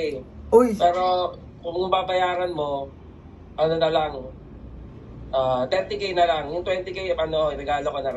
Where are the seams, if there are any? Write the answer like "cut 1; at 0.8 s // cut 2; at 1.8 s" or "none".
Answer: none